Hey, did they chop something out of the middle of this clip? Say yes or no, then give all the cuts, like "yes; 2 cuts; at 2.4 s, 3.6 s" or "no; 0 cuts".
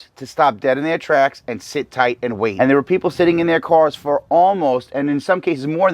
yes; 1 cut; at 2.5 s